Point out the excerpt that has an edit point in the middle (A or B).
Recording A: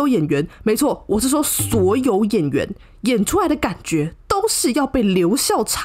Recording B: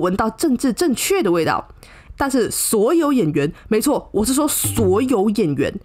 B